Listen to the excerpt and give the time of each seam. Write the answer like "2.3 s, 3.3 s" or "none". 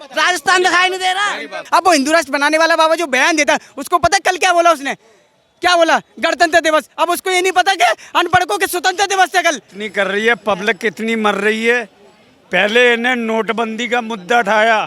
1.6 s, 9.7 s